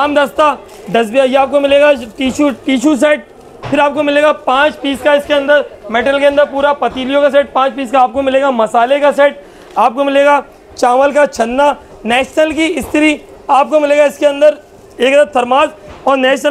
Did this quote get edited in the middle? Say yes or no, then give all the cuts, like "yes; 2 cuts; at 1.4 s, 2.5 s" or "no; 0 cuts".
no; 0 cuts